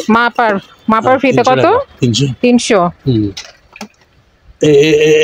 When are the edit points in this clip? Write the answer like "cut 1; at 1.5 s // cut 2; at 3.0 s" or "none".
none